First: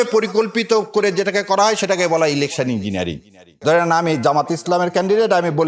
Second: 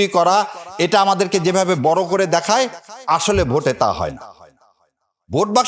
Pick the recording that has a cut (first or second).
first